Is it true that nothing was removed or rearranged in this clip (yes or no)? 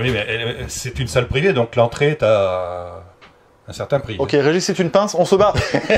yes